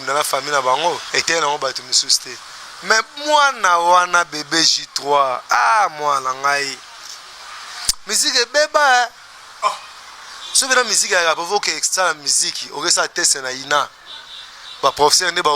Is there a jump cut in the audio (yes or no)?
yes